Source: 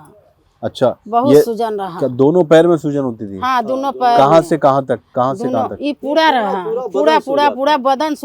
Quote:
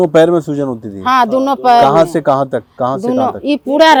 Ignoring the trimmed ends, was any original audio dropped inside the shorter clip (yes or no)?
no